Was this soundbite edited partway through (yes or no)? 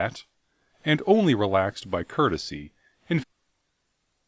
no